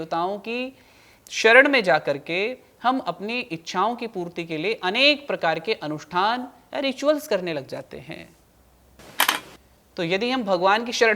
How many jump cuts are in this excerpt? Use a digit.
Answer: 1